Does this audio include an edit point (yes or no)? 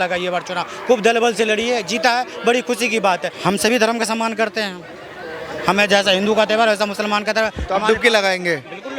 no